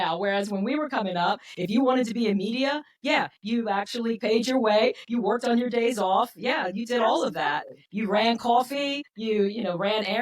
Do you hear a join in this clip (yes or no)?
yes